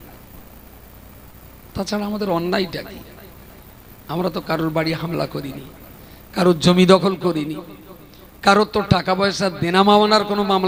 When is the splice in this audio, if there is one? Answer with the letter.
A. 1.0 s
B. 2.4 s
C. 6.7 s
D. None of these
D